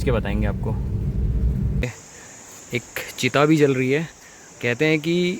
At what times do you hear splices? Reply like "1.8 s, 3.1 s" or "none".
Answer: 1.8 s